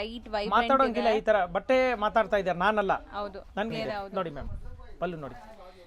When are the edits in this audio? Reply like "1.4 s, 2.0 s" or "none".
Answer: 3.7 s